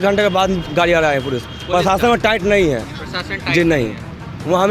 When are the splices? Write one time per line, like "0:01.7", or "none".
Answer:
none